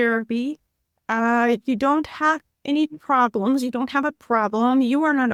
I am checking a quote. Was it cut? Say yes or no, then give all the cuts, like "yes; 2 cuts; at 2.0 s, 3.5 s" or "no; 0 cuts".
no; 0 cuts